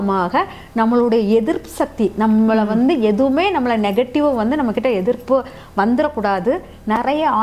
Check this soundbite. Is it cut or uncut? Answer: uncut